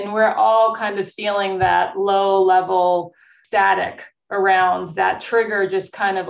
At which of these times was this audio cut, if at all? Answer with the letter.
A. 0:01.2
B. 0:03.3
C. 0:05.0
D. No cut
B